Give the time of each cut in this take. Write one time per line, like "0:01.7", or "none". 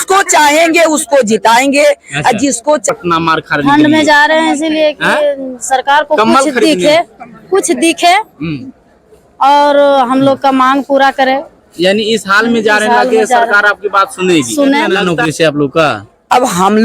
0:02.8
0:15.0